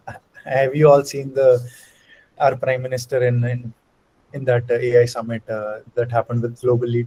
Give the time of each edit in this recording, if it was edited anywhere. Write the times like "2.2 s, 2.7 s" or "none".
none

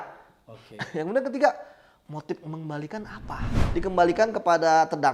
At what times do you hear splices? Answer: 3.6 s

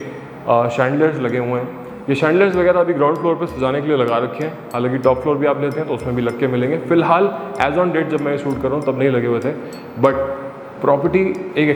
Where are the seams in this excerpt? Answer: none

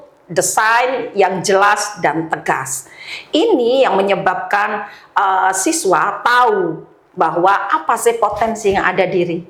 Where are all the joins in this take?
none

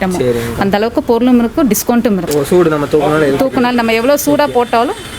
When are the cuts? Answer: 2.2 s

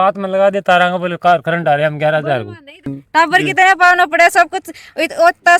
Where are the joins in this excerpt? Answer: 3.0 s

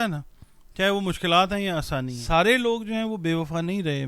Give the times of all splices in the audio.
2.1 s

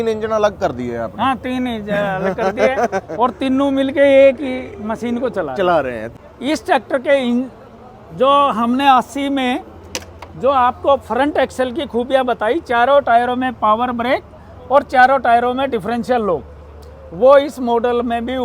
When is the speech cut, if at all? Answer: 6.0 s

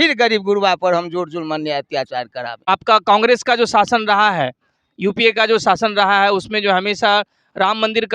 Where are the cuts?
2.6 s

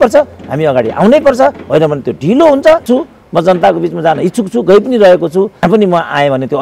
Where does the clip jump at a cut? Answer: 2.9 s, 5.6 s

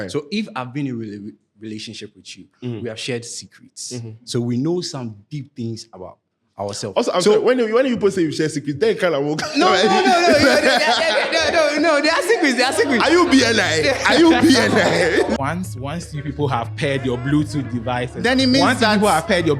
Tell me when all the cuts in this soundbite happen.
15.4 s

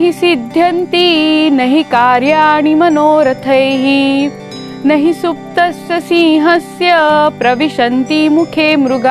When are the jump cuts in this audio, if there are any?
none

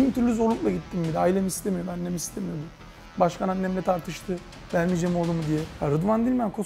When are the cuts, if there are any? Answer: 5.7 s

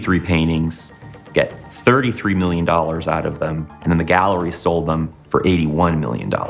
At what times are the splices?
3.7 s

